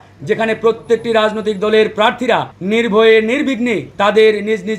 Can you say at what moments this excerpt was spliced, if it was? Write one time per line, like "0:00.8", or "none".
0:02.5
0:03.9